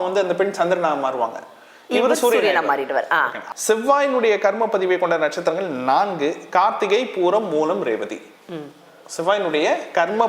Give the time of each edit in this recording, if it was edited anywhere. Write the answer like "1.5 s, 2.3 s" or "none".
3.4 s